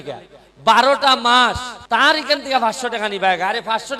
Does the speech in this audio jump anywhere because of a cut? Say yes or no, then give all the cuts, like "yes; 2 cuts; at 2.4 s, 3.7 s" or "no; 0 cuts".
yes; 1 cut; at 1.7 s